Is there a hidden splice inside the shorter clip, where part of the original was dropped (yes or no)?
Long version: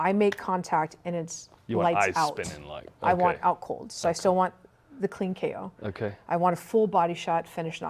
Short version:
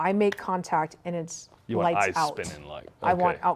no